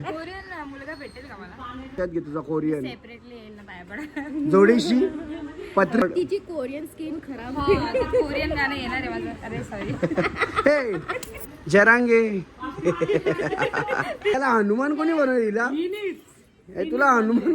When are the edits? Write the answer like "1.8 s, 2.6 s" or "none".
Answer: 1.9 s, 6.0 s, 11.3 s, 14.4 s